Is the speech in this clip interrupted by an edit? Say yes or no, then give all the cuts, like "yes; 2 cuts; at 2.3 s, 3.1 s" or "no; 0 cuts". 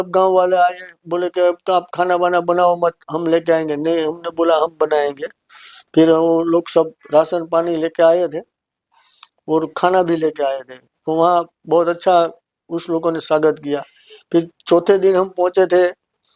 no; 0 cuts